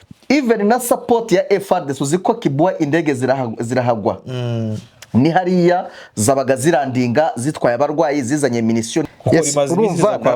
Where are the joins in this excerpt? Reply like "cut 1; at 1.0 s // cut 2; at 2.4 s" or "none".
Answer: cut 1; at 9.1 s